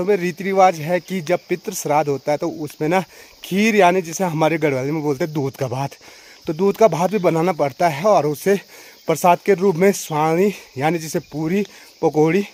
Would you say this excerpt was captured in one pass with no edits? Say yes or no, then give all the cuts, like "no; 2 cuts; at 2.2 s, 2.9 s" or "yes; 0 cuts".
yes; 0 cuts